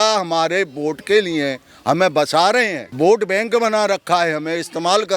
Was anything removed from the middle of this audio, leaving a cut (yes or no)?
yes